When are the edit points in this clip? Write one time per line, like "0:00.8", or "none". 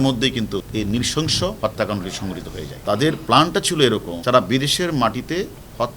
0:01.6